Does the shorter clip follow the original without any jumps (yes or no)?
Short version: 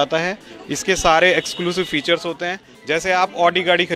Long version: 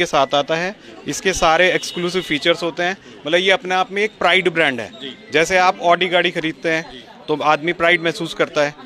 no